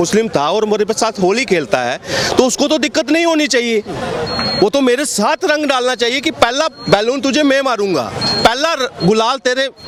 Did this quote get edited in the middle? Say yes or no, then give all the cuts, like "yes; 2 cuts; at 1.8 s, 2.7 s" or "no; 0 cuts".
no; 0 cuts